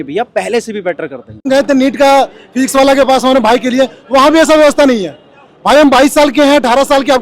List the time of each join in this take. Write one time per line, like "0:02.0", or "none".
0:01.5